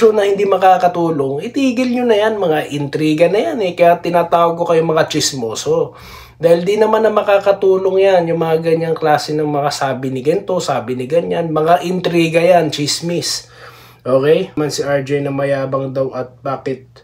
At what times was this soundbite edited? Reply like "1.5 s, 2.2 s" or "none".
14.6 s